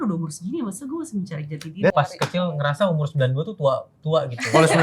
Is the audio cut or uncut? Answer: cut